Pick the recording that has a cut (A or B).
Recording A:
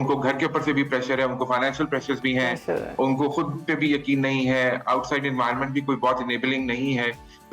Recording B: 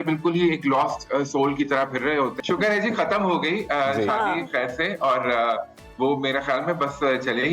B